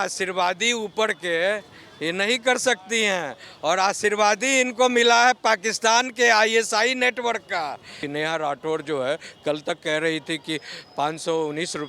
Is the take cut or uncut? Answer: cut